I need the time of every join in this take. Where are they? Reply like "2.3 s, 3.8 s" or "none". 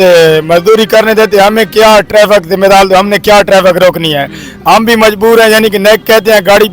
none